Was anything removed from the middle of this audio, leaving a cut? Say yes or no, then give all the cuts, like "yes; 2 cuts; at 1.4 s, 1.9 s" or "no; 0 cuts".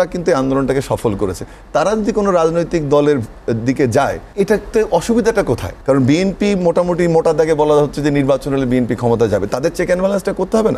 yes; 2 cuts; at 4.2 s, 5.7 s